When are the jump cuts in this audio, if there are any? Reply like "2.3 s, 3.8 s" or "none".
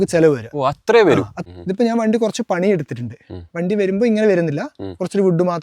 1.3 s